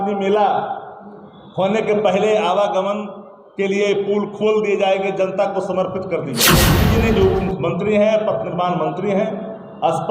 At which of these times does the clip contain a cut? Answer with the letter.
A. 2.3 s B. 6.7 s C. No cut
B